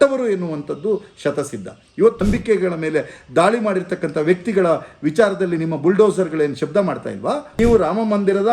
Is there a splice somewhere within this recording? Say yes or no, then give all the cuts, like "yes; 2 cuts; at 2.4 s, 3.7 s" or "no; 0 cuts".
yes; 2 cuts; at 2.2 s, 7.6 s